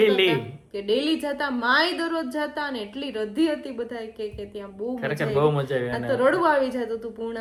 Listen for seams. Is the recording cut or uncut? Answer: uncut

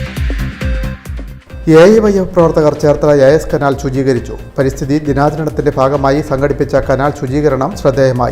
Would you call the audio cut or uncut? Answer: uncut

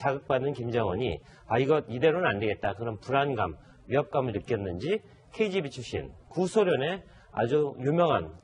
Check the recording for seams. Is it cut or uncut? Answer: cut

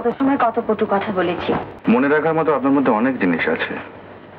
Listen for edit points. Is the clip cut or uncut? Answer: cut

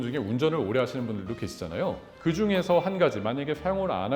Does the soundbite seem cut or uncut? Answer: cut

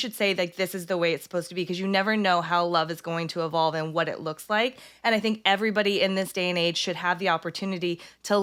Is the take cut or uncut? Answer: uncut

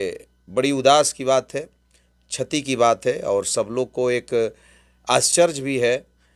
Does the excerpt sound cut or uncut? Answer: uncut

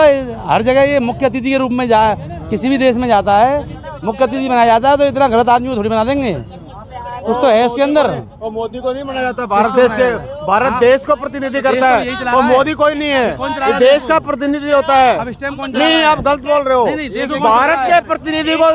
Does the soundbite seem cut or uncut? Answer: uncut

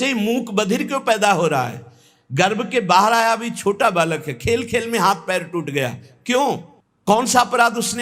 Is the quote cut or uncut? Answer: uncut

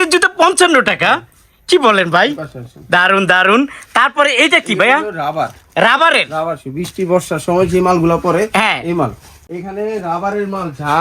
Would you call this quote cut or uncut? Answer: cut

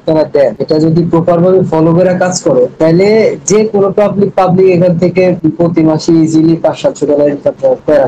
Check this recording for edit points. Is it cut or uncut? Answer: uncut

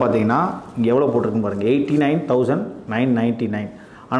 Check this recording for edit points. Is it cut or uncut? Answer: uncut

